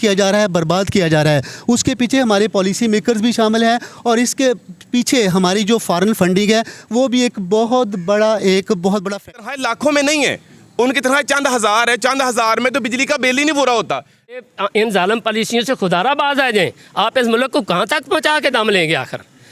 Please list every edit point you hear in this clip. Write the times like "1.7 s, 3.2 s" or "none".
9.3 s, 14.4 s